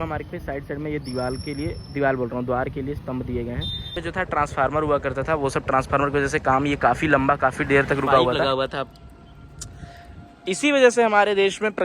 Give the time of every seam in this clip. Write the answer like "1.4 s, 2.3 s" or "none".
4.0 s, 8.4 s